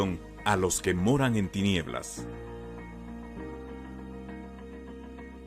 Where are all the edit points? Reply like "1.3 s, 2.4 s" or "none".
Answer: 4.2 s